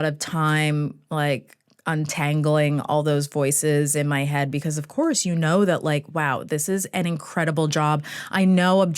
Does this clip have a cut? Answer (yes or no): no